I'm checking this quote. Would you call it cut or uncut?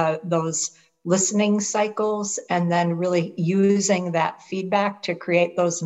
uncut